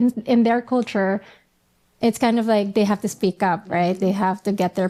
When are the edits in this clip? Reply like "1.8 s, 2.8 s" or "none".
none